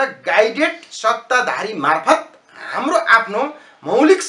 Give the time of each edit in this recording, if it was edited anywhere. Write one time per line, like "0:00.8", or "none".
none